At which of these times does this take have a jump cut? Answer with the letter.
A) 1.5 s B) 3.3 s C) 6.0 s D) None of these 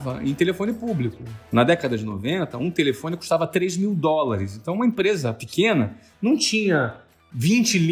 A